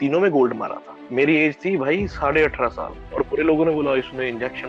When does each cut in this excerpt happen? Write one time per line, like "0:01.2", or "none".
0:01.1
0:03.1

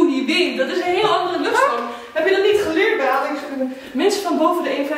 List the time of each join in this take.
none

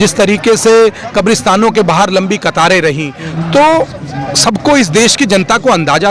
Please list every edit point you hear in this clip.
0:03.2

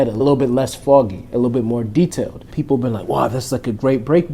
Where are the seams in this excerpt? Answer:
0:02.5

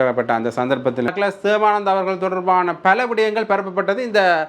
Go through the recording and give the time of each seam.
0:01.1

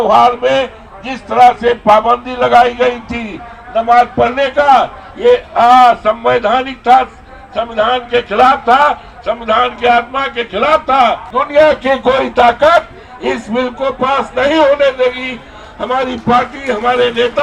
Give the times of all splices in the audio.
0:11.3

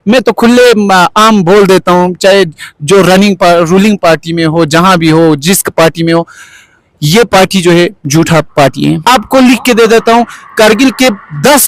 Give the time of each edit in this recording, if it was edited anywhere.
0:09.0

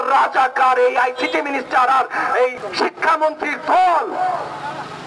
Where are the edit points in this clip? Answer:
0:02.6

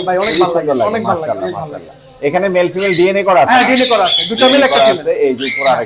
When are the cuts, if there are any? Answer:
none

